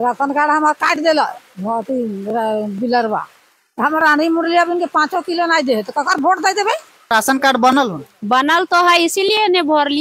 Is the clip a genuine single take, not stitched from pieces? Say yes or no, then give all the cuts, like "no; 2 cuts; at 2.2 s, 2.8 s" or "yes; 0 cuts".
no; 1 cut; at 7.0 s